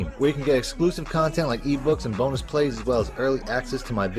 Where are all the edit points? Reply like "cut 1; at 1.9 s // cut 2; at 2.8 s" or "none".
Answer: none

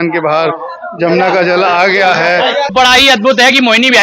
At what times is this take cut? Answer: cut 1; at 2.7 s

